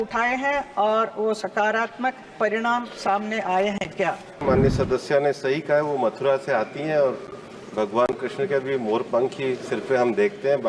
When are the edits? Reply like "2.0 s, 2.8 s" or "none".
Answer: 4.4 s